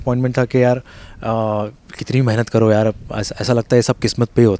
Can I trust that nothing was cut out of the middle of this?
yes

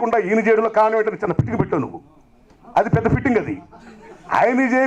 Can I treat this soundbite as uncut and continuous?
yes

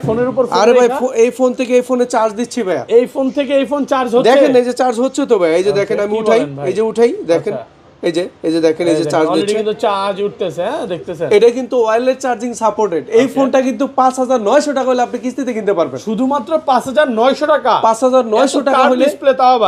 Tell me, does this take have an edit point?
no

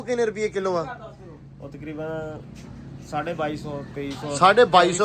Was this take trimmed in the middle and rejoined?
no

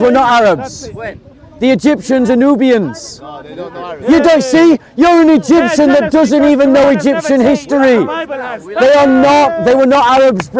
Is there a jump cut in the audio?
no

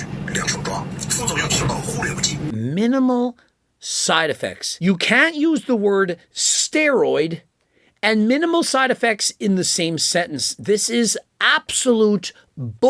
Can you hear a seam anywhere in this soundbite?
yes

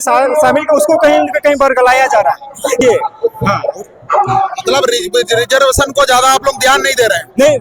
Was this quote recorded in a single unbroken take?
no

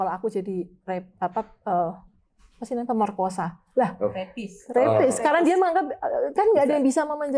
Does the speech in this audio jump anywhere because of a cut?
no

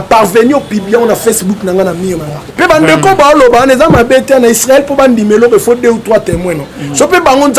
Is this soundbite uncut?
no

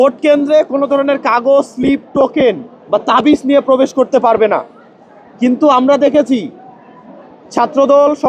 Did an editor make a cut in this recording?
no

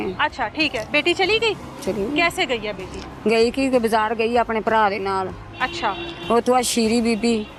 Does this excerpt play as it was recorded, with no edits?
yes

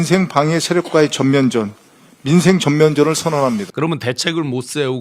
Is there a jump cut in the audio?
yes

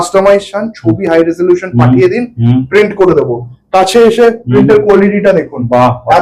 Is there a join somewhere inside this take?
no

